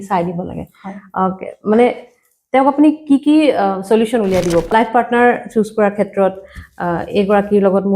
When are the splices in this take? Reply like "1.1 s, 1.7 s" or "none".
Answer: 4.7 s